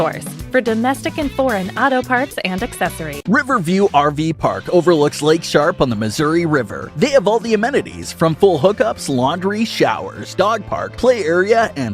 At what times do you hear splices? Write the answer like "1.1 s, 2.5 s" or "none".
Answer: 3.1 s